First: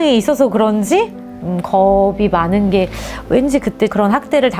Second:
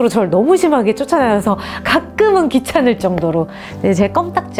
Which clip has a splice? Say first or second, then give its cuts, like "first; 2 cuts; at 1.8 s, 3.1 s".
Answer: first; 1 cut; at 1.2 s